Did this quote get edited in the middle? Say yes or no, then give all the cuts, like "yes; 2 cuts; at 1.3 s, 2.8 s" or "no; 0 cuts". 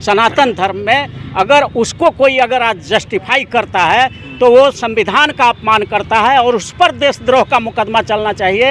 no; 0 cuts